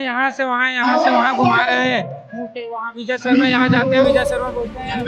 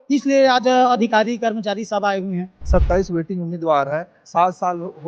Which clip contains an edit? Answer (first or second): second